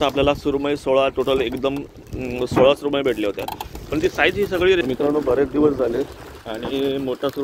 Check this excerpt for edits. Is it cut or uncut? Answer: cut